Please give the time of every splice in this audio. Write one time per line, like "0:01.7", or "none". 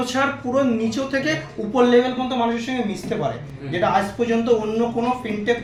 none